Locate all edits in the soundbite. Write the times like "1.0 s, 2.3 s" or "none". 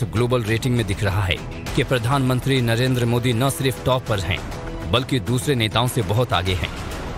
2.9 s

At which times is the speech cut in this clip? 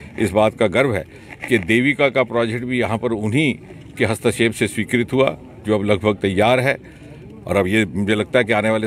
none

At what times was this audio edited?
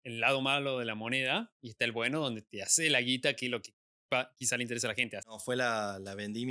5.3 s

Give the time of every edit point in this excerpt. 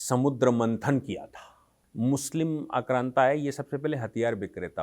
1.8 s

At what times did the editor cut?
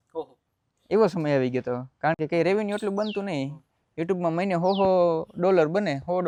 none

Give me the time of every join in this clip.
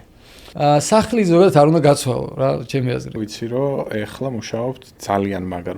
3.2 s

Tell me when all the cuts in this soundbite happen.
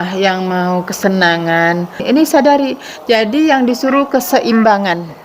2.0 s

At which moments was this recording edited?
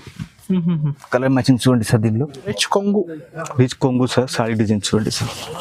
2.5 s

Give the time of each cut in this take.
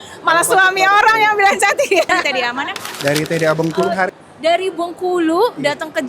2.2 s

